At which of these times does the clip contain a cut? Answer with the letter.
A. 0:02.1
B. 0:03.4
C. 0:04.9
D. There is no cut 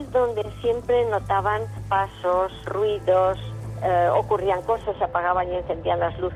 D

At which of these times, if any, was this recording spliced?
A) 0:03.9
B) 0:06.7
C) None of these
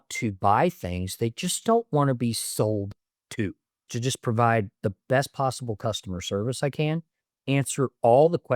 A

